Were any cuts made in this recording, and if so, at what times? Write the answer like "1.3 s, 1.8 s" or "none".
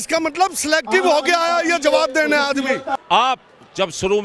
3.0 s